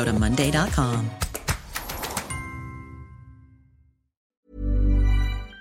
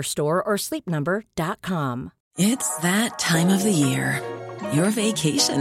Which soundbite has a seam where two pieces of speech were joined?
first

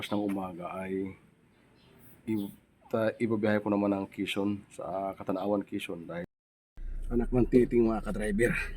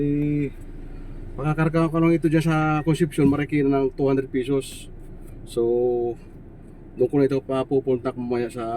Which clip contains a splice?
first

